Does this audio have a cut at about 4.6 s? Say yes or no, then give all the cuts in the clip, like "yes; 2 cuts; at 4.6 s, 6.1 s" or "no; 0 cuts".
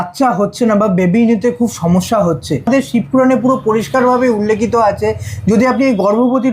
no; 1 cut; at 2.7 s